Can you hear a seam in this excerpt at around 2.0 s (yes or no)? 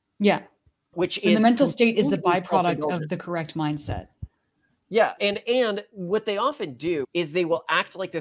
no